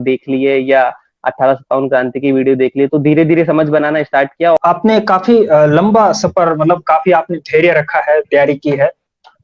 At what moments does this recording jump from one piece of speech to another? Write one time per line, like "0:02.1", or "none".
0:04.6